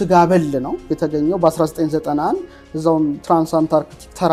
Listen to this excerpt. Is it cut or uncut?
uncut